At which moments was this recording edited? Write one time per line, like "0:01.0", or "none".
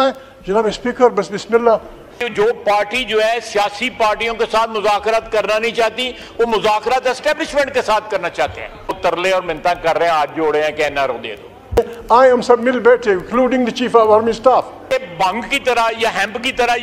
0:02.1
0:08.9
0:11.8
0:14.8